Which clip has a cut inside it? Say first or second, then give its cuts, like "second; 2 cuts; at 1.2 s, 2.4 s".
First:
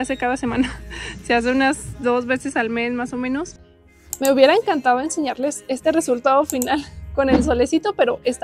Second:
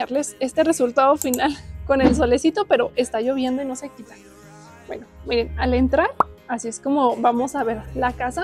first; 1 cut; at 3.9 s